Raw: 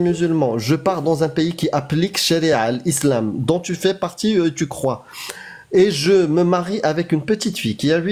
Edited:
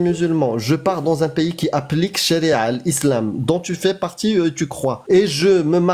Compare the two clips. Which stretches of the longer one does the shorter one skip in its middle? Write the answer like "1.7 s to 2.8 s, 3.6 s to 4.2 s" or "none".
5.0 s to 5.6 s